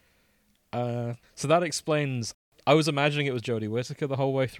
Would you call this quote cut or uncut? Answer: cut